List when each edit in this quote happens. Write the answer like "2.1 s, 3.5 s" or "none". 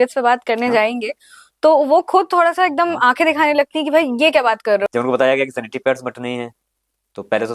4.8 s